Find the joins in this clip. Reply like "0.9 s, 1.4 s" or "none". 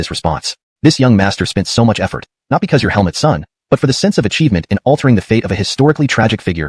none